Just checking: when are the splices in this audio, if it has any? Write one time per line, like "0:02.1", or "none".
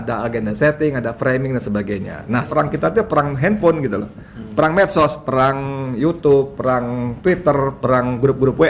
0:02.5